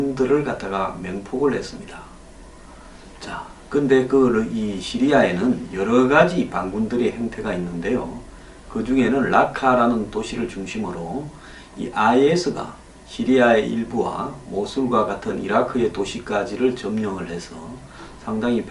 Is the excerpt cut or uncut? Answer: cut